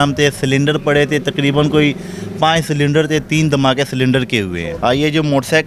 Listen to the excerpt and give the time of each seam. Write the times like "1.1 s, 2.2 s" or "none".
4.7 s